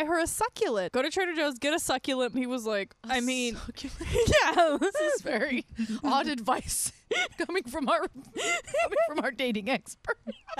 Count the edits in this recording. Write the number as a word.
two